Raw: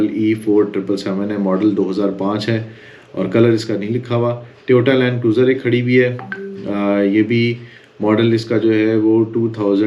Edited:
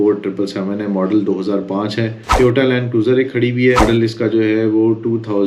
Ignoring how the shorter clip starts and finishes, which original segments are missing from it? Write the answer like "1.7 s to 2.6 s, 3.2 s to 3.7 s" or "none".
2.7 s to 4.5 s, 6.1 s to 8.1 s

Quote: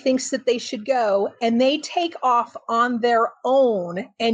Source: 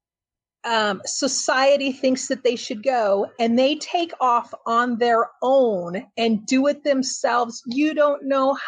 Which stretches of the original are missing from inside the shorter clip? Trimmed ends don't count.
none

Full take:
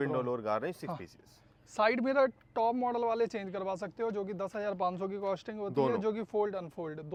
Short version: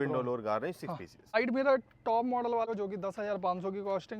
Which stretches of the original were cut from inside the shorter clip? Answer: 1.3 s to 1.8 s, 3.2 s to 4.0 s

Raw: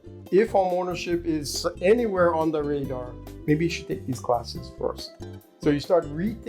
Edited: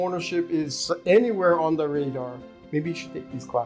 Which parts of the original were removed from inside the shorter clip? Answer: none

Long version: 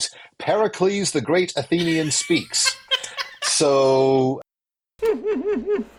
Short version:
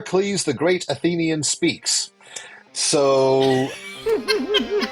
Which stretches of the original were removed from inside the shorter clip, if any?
4.5 s to 4.8 s

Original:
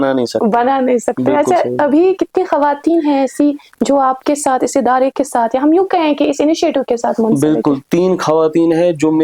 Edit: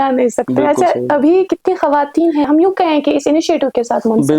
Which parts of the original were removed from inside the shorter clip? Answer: 3.2 s to 5.6 s

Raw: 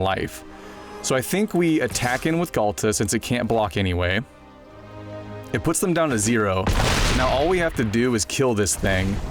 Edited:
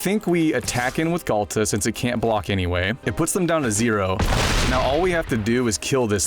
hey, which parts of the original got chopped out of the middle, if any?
4.3 s to 5.5 s

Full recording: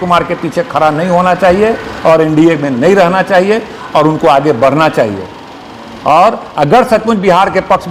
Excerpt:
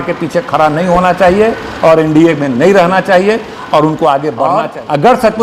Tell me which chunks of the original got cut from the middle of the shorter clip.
4.8 s to 6.2 s

